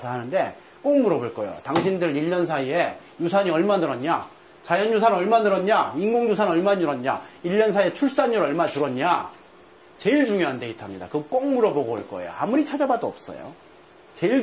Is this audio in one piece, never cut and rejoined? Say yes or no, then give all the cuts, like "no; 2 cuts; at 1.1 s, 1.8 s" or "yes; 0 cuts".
yes; 0 cuts